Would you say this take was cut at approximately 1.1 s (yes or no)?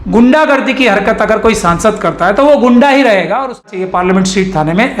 no